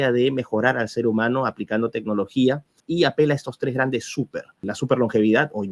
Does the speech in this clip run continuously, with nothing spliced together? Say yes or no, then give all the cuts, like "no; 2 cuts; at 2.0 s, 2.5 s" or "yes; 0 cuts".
no; 2 cuts; at 2.8 s, 4.6 s